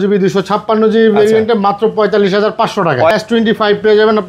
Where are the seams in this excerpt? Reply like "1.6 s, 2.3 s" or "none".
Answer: 3.1 s